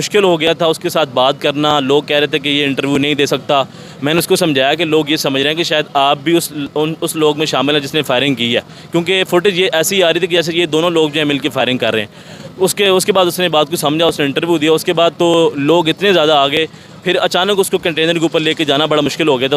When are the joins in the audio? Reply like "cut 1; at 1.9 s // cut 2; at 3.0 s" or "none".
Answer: none